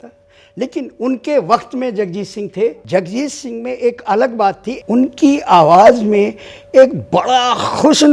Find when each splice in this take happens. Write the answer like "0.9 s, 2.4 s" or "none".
2.8 s, 4.7 s